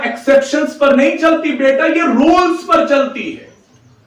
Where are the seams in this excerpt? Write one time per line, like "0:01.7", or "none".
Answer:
none